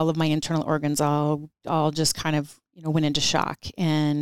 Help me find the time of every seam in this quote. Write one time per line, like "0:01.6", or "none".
0:01.5
0:02.6